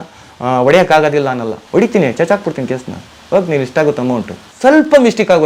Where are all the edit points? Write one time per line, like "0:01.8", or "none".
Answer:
0:01.6
0:04.4